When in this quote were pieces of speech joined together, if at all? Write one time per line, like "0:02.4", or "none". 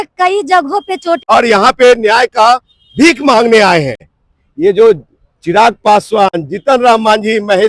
0:01.2
0:04.1